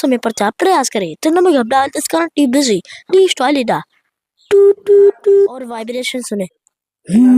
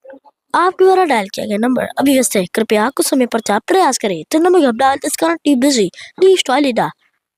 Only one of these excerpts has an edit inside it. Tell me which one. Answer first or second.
first